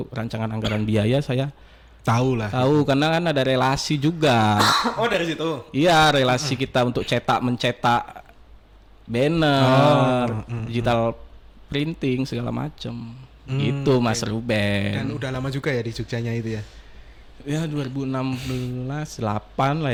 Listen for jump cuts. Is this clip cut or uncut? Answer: uncut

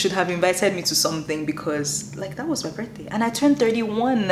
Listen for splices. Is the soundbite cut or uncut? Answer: uncut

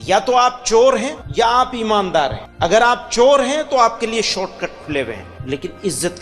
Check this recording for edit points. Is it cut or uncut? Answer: cut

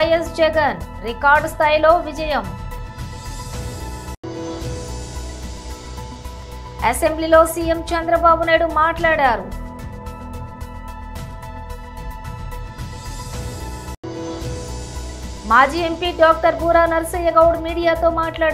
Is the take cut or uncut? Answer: uncut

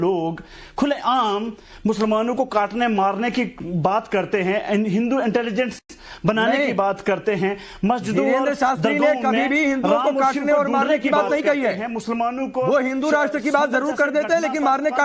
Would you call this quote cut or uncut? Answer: uncut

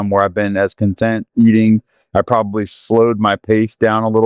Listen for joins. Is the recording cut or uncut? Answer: uncut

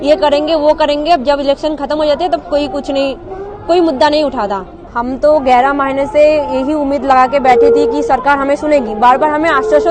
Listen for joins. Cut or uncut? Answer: uncut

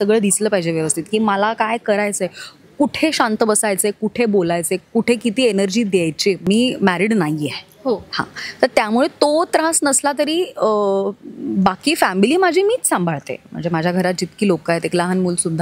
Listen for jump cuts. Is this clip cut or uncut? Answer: cut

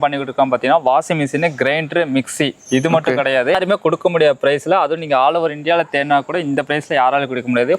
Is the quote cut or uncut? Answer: cut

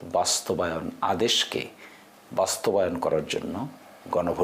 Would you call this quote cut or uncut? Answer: uncut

